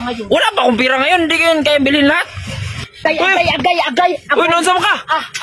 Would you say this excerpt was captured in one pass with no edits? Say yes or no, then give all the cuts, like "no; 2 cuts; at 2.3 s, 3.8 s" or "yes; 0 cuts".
no; 1 cut; at 2.8 s